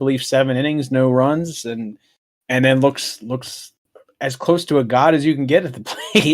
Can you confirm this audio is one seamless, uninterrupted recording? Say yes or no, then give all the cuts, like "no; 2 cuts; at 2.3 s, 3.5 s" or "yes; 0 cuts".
no; 1 cut; at 2.3 s